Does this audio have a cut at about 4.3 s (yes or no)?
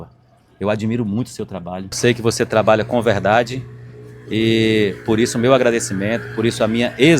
no